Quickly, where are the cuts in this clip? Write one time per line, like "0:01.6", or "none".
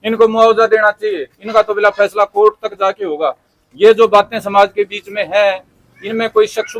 none